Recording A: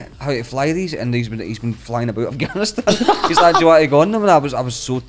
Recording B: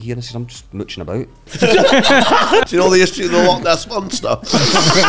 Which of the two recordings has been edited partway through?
B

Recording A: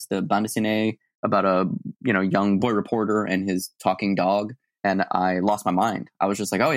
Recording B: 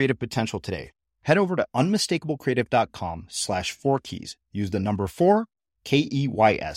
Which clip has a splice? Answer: A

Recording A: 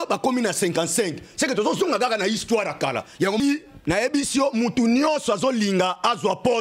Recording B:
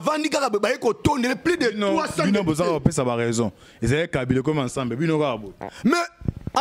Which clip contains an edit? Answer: A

